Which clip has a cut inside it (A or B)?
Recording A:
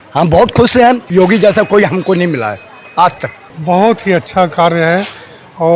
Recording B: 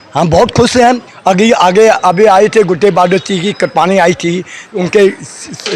A